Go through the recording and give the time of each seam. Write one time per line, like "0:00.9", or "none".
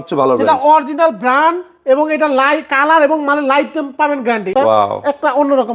0:04.5